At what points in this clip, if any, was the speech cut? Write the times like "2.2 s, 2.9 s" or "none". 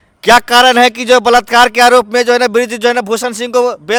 none